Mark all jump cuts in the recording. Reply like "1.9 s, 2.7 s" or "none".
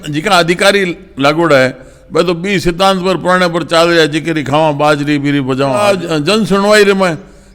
5.9 s